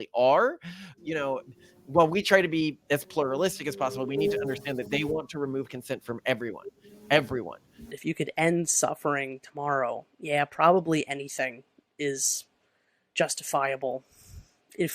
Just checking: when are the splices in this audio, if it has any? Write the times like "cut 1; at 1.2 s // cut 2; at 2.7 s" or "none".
cut 1; at 0.9 s // cut 2; at 7.8 s

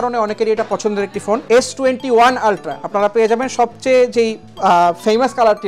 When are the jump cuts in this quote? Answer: cut 1; at 1.4 s

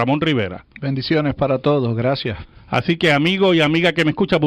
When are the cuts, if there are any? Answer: cut 1; at 1.5 s

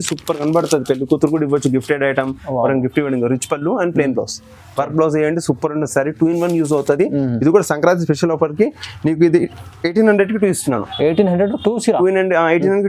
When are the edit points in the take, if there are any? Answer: none

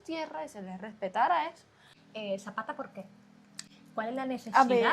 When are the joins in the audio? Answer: cut 1; at 2.0 s

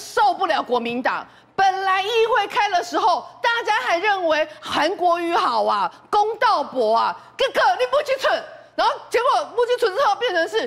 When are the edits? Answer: none

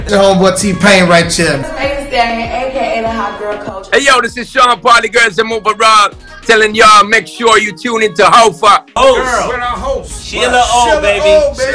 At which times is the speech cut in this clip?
none

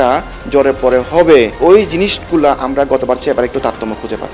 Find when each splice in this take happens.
cut 1; at 1.5 s

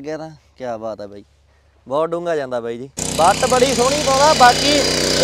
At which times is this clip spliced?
cut 1; at 3.0 s

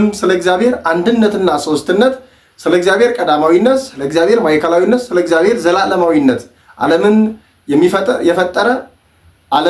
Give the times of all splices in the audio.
none

